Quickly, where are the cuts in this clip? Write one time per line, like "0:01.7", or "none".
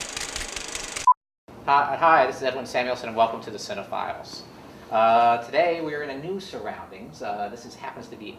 0:05.1

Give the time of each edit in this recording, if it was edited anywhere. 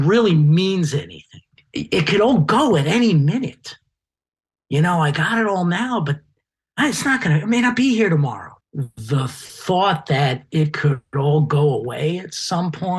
0:08.5

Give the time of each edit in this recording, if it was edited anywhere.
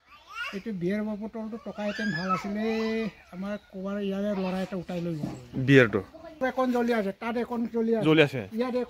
0:06.4

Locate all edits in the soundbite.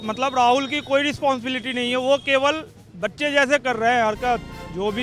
none

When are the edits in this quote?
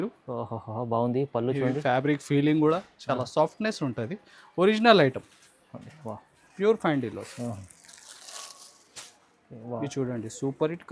0:06.4

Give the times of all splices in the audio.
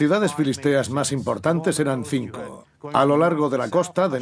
0:02.7

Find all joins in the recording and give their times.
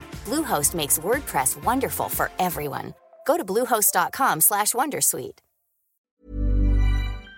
0:05.9

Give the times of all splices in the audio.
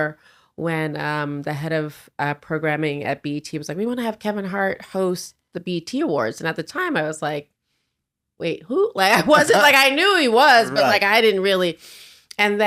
none

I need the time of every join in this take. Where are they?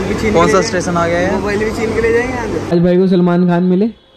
0:02.6

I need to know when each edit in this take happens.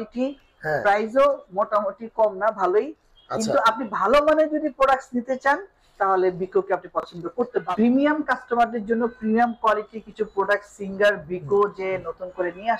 0:07.7

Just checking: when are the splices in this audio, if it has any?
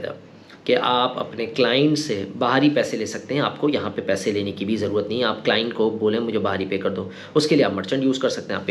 none

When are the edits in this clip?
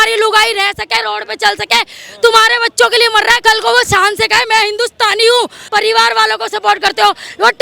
0:03.4
0:05.6

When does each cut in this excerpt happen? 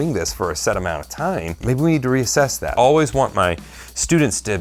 0:01.6
0:02.7

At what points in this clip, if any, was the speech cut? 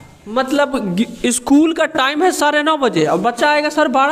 none

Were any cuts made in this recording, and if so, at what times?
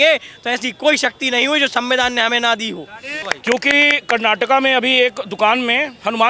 0:03.2

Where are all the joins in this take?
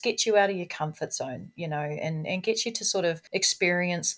0:03.2

